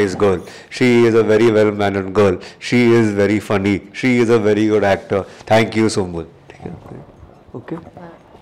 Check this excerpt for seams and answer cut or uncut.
uncut